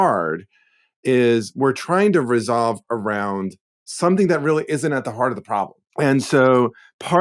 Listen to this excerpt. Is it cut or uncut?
cut